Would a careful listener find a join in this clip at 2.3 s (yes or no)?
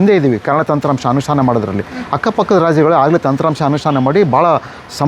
no